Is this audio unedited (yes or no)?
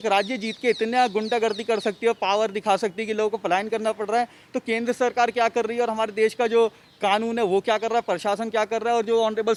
yes